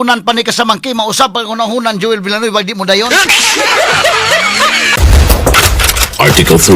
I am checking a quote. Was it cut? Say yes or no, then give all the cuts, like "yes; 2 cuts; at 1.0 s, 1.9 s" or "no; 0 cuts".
yes; 1 cut; at 5.0 s